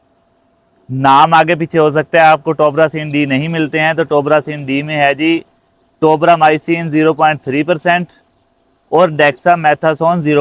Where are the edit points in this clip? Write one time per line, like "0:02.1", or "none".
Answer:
none